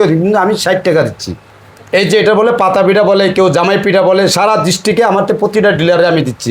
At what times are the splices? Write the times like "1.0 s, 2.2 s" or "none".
1.5 s